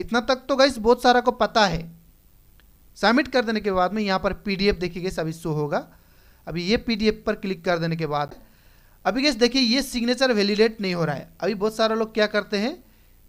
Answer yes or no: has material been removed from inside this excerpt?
yes